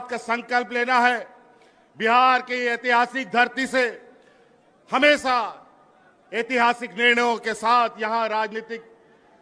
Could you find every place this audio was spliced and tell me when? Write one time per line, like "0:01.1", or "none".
none